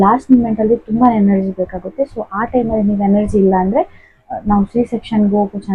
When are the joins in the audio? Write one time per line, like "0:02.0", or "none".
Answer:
none